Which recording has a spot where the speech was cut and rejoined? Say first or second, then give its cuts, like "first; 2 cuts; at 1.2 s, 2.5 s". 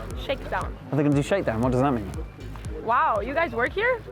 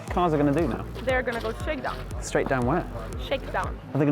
second; 2 cuts; at 0.9 s, 2.1 s